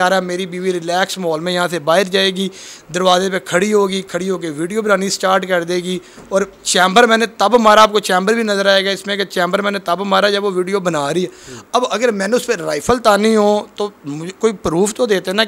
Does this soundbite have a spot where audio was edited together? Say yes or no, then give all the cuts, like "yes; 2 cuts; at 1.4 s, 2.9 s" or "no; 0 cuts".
no; 0 cuts